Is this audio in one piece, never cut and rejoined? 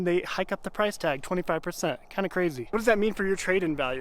no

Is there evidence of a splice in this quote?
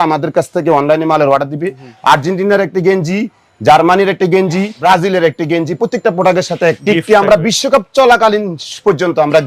yes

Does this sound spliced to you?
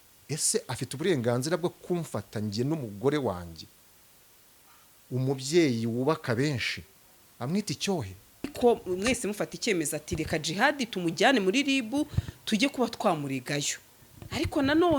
yes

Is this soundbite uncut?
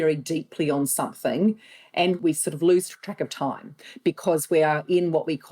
no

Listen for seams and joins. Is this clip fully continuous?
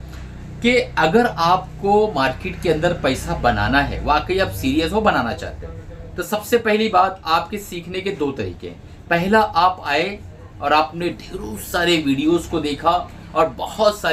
yes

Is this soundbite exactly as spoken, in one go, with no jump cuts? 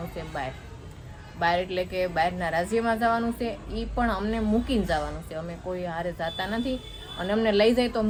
yes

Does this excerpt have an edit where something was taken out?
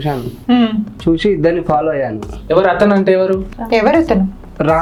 no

